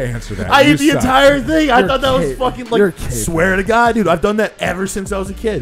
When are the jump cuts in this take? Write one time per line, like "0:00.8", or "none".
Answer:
none

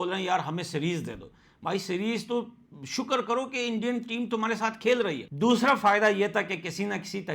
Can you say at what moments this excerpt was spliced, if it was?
0:05.3

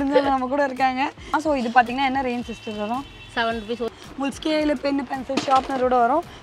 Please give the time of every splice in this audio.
0:01.4
0:03.9

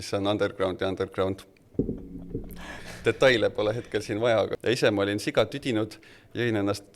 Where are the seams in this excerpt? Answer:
0:04.6

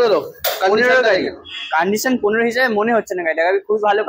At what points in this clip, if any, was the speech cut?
none

